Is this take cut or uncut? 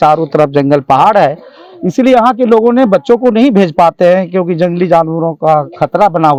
uncut